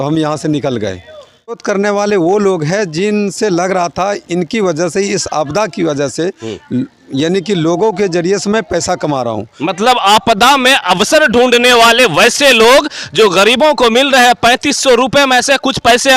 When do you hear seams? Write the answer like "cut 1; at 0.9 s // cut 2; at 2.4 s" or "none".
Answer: cut 1; at 1.6 s